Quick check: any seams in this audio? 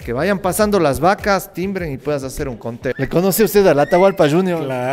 yes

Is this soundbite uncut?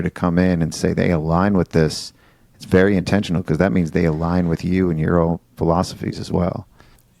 yes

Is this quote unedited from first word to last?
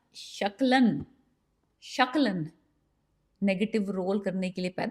yes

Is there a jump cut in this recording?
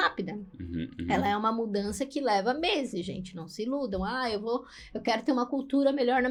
no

